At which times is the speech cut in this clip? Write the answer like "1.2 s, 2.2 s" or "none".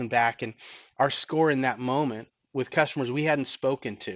none